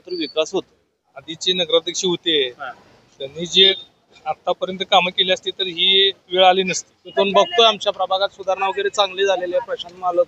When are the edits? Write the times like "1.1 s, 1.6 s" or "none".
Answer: 1.1 s, 7.0 s

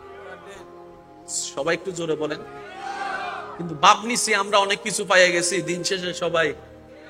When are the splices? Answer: 1.4 s

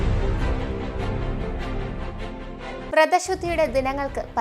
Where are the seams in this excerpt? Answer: 1.1 s, 2.9 s

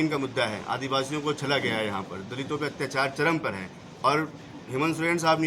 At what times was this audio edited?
none

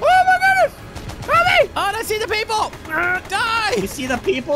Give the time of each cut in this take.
none

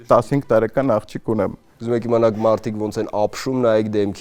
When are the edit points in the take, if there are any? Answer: 1.7 s

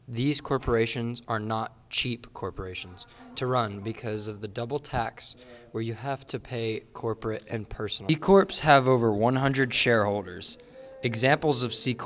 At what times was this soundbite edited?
8.0 s

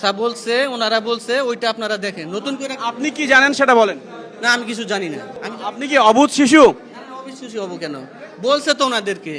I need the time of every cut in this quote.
5.3 s

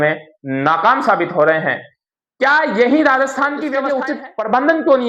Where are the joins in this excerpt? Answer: 3.9 s

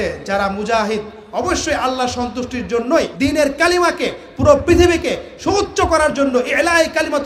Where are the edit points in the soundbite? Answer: none

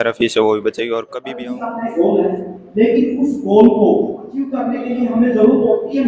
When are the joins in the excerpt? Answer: 1.1 s, 4.6 s

